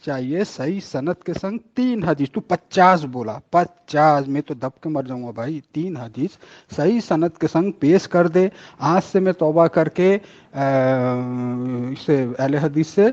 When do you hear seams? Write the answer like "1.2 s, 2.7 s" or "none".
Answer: none